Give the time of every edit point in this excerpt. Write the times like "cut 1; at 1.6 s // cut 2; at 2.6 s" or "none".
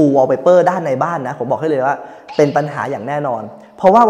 none

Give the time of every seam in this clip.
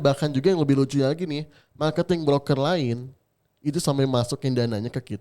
none

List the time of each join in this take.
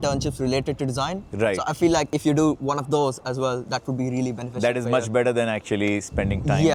none

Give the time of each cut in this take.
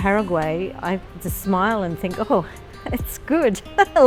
none

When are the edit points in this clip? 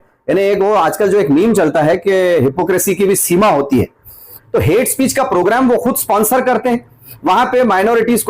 cut 1; at 4.4 s

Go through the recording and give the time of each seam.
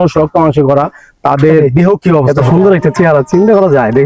cut 1; at 2.4 s

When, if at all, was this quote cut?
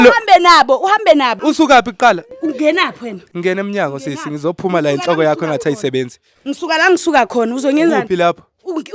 cut 1; at 1.4 s

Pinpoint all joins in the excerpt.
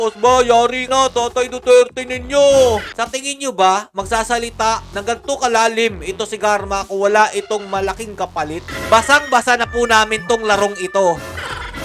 cut 1; at 3.0 s // cut 2; at 8.6 s

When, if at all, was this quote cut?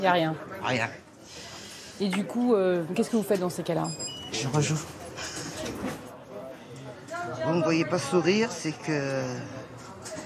cut 1; at 6.0 s

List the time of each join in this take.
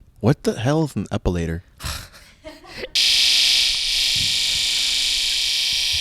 cut 1; at 2.9 s

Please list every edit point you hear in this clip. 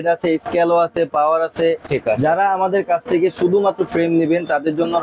cut 1; at 1.9 s

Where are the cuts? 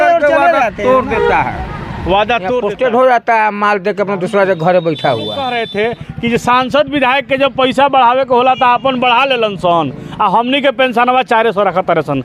cut 1; at 2.6 s // cut 2; at 5.5 s

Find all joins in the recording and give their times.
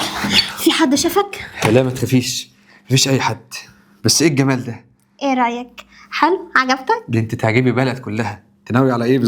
none

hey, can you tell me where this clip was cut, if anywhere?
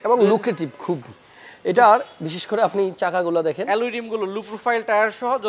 none

